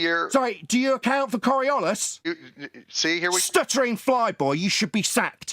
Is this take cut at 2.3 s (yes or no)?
yes